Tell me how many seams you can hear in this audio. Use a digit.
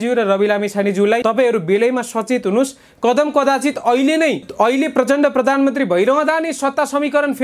2